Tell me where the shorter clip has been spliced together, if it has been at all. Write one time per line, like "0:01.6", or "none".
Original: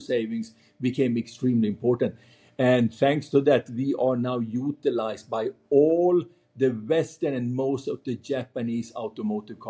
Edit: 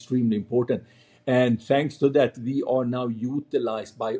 none